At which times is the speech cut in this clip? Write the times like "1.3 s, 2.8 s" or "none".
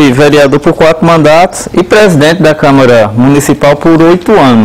none